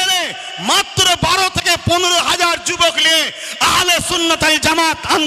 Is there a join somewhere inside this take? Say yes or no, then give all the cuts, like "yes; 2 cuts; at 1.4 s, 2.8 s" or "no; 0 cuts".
no; 0 cuts